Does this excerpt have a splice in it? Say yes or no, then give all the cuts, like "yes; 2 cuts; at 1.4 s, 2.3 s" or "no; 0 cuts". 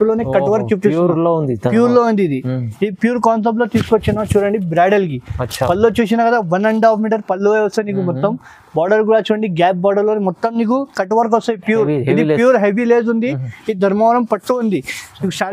no; 0 cuts